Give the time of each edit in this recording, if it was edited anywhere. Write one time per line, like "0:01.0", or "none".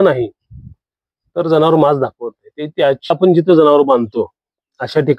0:03.1